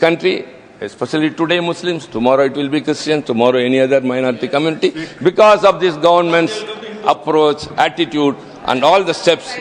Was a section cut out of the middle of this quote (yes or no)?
no